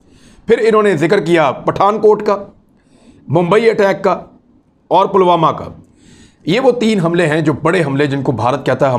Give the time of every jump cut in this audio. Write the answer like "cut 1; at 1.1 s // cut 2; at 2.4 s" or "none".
none